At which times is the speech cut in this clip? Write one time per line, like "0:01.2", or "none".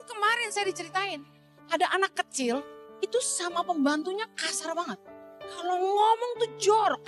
0:01.5
0:02.8
0:05.6